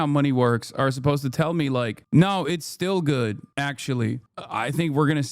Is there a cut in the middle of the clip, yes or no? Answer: yes